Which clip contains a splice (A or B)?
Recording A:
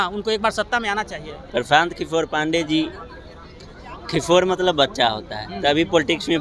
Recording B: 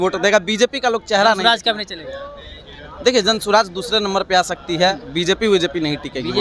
A